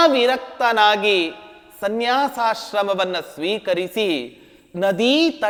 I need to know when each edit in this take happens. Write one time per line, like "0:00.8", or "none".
none